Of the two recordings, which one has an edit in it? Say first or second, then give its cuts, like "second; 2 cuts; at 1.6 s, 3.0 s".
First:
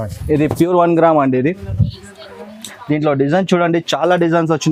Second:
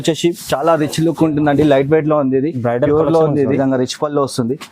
second; 1 cut; at 3.6 s